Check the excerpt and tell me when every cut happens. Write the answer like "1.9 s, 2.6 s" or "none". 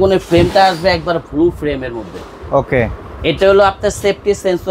none